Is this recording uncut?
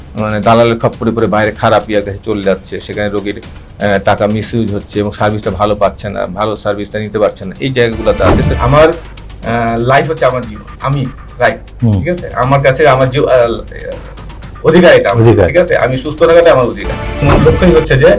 no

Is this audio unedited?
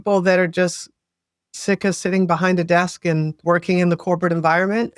no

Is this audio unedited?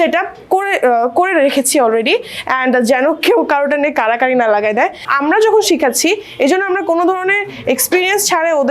no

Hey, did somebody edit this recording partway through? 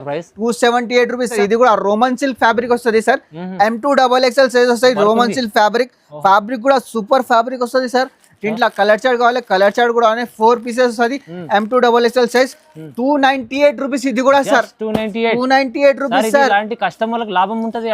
yes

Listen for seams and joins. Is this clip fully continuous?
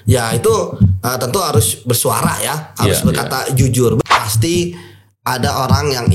no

